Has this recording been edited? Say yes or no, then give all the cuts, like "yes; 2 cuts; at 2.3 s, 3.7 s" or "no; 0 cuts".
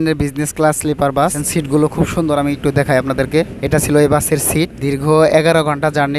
yes; 3 cuts; at 1.4 s, 3.6 s, 4.7 s